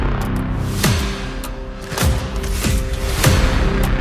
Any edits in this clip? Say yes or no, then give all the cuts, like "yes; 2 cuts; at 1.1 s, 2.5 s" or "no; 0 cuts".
no; 0 cuts